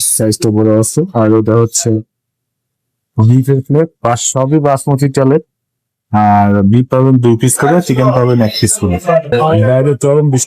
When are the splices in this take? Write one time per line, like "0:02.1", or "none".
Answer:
0:09.3